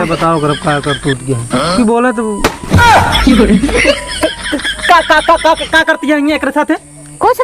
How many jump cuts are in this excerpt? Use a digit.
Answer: 1